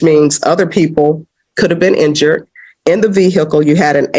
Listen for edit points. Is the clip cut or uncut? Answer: uncut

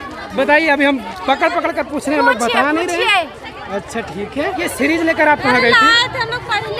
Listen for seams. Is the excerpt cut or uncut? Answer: cut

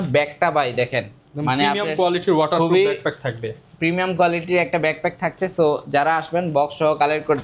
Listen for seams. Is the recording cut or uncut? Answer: uncut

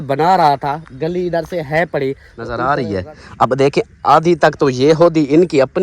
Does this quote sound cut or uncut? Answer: cut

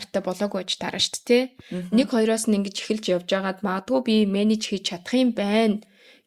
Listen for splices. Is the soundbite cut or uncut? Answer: uncut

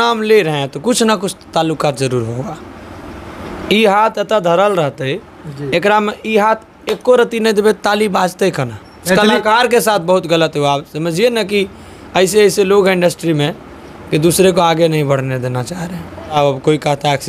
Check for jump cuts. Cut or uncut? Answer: cut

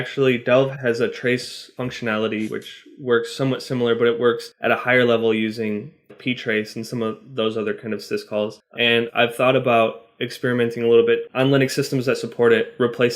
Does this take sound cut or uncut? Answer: cut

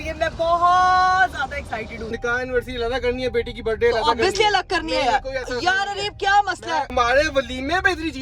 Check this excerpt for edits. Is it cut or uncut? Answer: cut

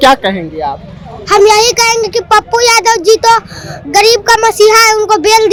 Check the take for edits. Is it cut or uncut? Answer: uncut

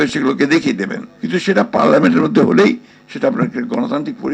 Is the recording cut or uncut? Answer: uncut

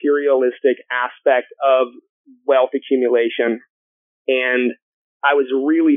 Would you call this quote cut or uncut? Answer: uncut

